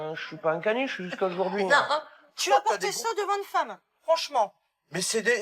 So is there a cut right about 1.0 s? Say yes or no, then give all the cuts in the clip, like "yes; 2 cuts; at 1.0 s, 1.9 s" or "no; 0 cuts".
no; 1 cut; at 2.4 s